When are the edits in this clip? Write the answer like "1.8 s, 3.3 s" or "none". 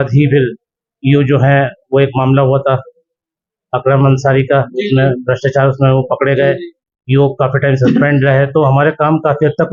none